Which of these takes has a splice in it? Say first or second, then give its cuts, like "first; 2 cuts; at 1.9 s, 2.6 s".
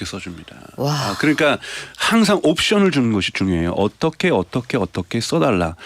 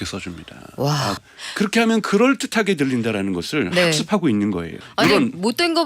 second; 2 cuts; at 1.2 s, 4.8 s